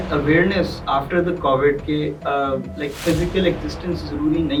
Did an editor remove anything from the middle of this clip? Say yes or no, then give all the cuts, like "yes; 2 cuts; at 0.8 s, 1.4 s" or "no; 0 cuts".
no; 0 cuts